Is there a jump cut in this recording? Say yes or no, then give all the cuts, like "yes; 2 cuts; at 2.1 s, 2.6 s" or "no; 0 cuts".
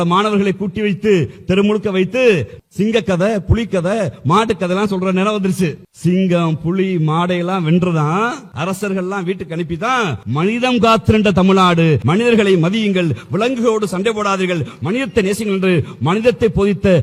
no; 0 cuts